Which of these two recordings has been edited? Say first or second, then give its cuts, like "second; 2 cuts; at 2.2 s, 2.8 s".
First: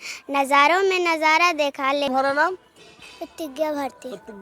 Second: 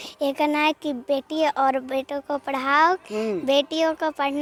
first; 1 cut; at 2.1 s